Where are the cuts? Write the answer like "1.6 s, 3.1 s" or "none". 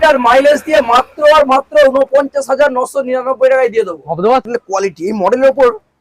4.5 s